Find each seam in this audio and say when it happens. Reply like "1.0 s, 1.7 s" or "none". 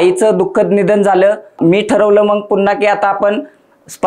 1.6 s